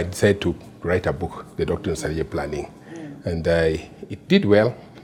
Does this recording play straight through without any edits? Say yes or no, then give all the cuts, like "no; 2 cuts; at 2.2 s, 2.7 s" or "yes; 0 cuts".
yes; 0 cuts